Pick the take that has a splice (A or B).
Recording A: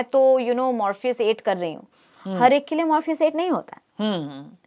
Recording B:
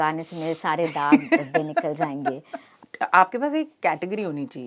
B